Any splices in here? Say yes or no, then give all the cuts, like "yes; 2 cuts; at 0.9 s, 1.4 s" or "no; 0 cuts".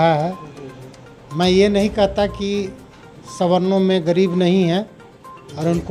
no; 0 cuts